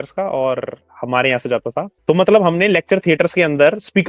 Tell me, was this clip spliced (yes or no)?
yes